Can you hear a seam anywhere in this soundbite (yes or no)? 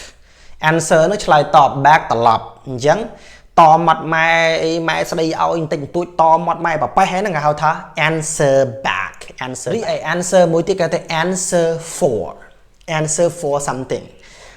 yes